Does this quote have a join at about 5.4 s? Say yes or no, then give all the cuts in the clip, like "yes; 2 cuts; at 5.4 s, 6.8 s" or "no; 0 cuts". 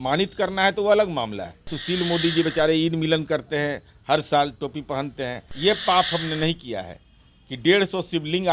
yes; 2 cuts; at 1.8 s, 5.4 s